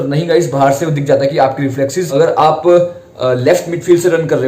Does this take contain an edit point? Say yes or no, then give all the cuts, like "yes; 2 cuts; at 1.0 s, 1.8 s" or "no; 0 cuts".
yes; 1 cut; at 2.0 s